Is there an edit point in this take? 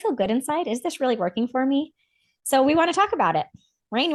no; 0 cuts

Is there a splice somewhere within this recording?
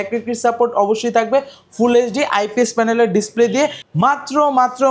yes; 1 cut; at 3.8 s

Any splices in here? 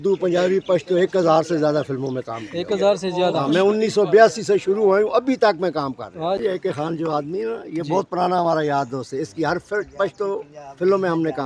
yes; 1 cut; at 6.4 s

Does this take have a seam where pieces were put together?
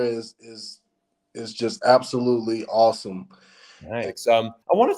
yes; 1 cut; at 4.0 s

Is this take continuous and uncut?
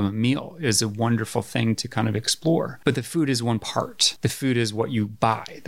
no; 2 cuts; at 2.7 s, 4.0 s

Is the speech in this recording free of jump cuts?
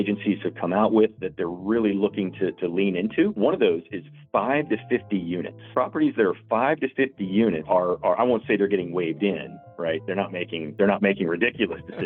no; 4 cuts; at 3.3 s, 5.5 s, 7.7 s, 10.7 s

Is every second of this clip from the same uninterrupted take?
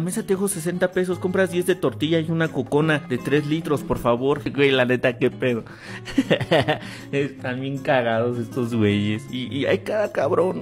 no; 1 cut; at 9.6 s

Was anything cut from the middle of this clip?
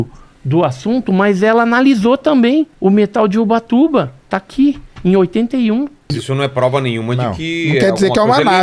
yes; 2 cuts; at 2.7 s, 6.2 s

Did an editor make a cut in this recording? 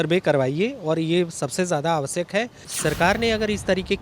yes; 1 cut; at 2.7 s

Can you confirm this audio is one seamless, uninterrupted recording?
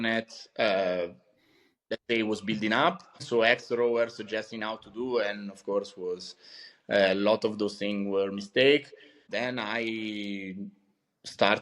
no; 2 cuts; at 3.2 s, 9.3 s

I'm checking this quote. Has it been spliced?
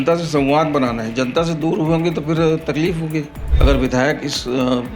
yes; 1 cut; at 3.4 s

